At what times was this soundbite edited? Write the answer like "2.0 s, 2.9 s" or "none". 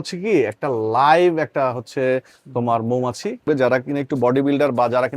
3.4 s